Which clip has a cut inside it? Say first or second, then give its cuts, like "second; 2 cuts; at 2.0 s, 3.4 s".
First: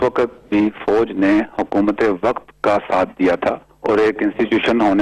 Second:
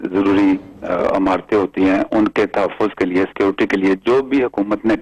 first; 1 cut; at 3.7 s